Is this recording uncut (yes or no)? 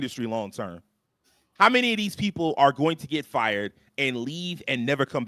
yes